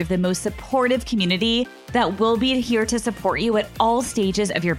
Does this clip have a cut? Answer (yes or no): no